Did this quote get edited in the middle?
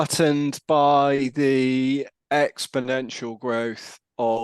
yes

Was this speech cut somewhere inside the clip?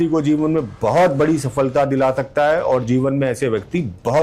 no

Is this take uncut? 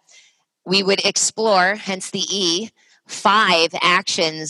yes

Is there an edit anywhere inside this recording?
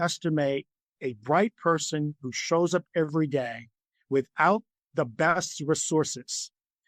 no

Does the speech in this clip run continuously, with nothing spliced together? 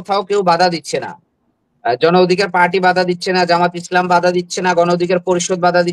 yes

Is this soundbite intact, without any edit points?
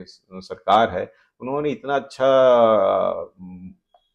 yes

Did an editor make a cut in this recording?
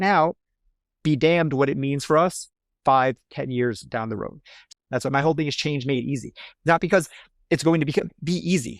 yes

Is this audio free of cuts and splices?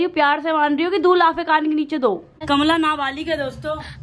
no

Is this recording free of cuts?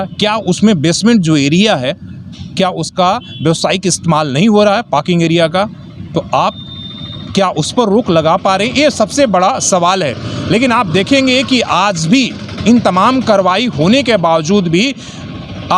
yes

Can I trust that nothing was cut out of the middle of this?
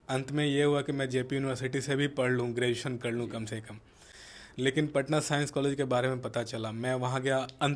yes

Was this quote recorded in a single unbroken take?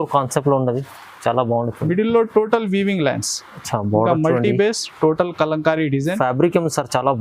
yes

